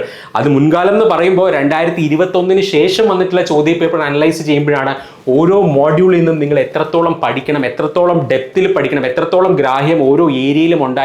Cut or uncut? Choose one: uncut